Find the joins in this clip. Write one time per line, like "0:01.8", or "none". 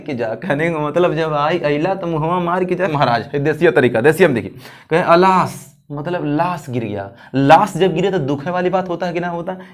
0:02.9

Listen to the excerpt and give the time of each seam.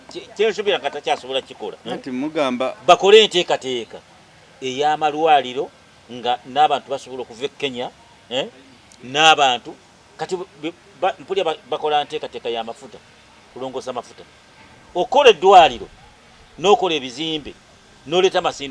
0:01.8

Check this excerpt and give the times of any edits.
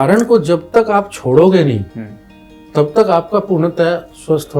none

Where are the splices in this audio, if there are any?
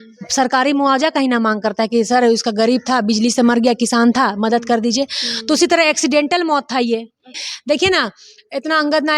0:07.4

